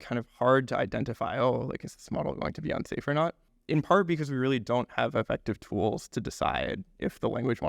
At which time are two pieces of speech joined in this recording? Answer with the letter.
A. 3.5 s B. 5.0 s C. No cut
A